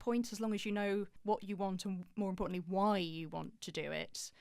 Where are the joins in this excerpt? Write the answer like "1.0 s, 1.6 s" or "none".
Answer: 1.1 s